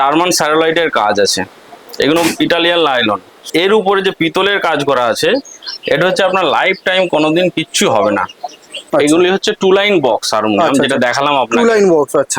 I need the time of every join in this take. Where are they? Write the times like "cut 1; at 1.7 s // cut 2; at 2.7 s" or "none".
cut 1; at 3.4 s // cut 2; at 8.7 s